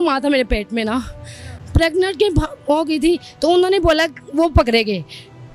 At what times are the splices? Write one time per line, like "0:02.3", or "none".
none